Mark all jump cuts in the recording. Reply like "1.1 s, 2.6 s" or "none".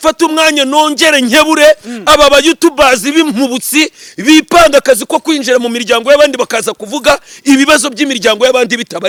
none